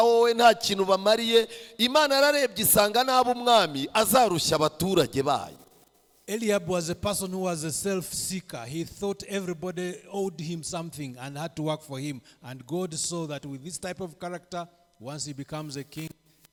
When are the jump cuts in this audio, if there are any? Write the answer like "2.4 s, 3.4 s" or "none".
none